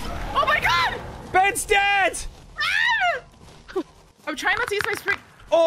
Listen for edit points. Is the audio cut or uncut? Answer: cut